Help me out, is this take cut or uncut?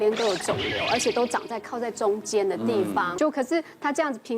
cut